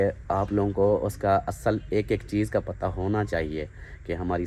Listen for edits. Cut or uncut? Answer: uncut